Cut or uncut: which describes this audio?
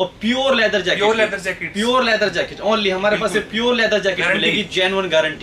uncut